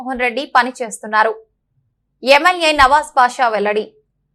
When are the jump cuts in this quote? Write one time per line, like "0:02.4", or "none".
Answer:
none